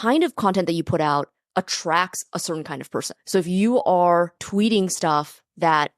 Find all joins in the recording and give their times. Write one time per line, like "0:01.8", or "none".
0:03.2
0:04.4